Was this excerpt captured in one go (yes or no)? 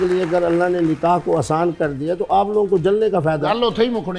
yes